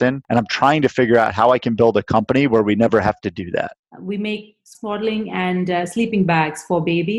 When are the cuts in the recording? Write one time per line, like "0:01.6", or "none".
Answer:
0:03.7